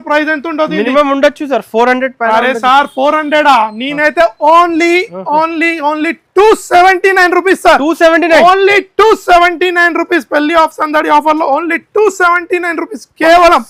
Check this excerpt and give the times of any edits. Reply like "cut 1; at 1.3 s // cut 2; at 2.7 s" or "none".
none